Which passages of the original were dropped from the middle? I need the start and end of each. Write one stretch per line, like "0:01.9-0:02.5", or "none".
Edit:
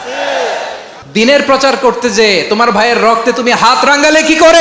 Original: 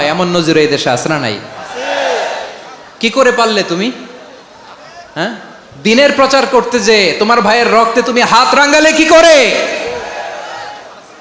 0:02.6-0:05.6

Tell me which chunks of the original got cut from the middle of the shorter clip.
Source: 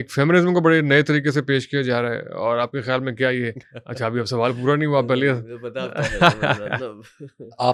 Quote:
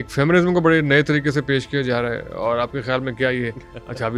none

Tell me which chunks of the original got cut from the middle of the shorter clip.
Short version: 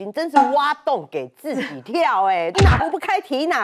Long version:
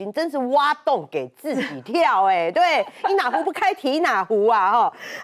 0:02.5-0:03.1

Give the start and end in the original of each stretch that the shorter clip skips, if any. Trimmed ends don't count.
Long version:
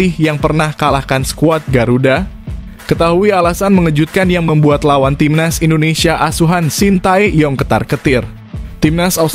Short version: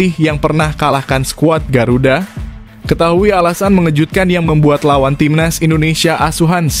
none

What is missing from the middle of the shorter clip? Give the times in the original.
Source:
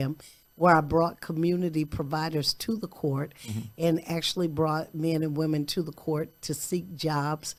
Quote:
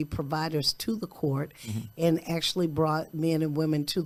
none

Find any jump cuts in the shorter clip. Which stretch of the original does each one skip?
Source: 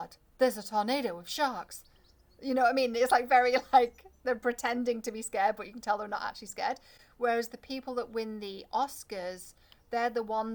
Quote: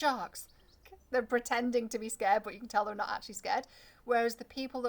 0:02.3-0:04.1

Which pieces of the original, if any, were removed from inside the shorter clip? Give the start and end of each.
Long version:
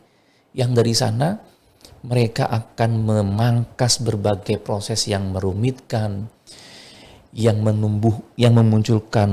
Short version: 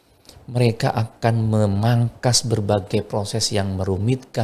none

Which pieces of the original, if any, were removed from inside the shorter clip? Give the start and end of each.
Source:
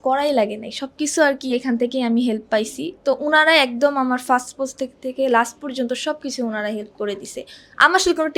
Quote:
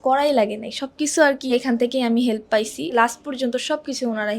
0:02.9-0:05.3

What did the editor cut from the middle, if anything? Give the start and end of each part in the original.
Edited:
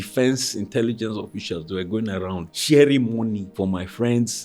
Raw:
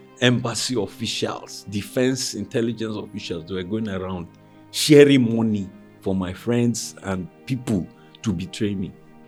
0:04.3-0:04.7
0:05.7-0:05.9

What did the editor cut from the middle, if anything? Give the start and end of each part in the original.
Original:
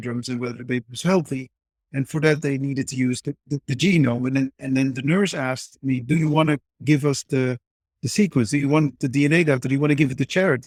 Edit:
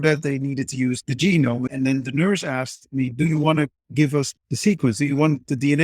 0:03.2-0:03.6
0:04.3-0:04.6
0:07.2-0:07.8

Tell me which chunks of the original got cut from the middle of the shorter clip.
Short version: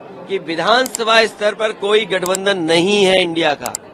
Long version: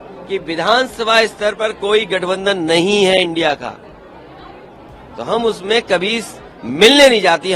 none

